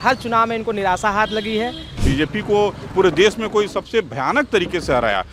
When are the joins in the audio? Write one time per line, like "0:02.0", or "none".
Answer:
0:02.0